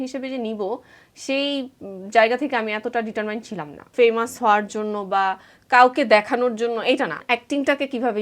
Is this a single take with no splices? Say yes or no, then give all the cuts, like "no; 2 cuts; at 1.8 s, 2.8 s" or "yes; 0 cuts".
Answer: no; 2 cuts; at 3.8 s, 7.2 s